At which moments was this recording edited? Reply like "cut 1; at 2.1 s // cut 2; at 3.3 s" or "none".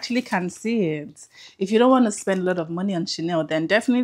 none